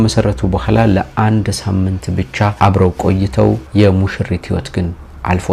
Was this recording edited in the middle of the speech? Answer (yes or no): no